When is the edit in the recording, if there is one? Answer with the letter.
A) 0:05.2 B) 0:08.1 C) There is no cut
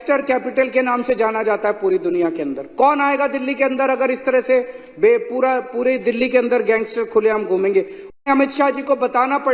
B